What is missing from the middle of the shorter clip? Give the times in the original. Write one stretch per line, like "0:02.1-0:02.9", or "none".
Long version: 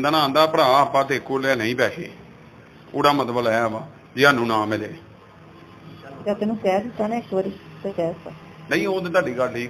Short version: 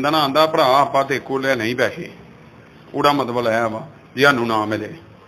none